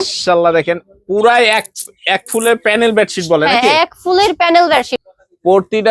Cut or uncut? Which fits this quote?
cut